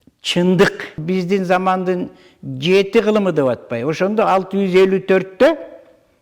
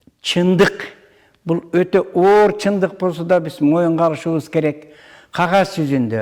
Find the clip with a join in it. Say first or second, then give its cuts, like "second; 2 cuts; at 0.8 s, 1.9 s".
first; 1 cut; at 1.0 s